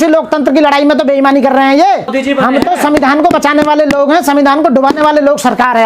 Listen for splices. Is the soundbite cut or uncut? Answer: cut